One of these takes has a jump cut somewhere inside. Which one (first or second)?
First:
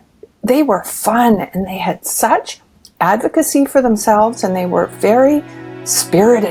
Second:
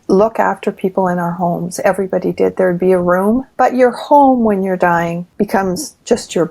second